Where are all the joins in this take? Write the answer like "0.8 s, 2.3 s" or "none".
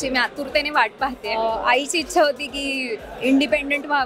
1.4 s